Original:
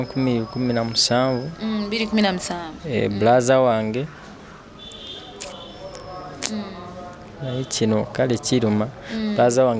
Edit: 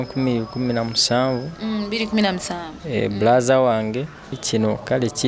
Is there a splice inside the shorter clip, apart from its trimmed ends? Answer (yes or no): yes